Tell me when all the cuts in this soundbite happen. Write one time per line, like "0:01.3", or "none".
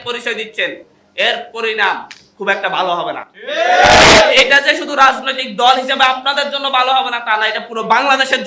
none